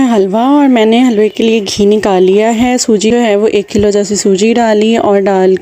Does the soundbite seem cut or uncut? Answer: cut